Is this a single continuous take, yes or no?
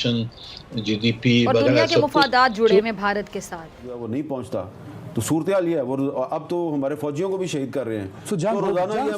no